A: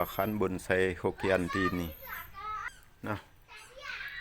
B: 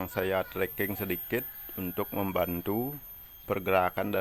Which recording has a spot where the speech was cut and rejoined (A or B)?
A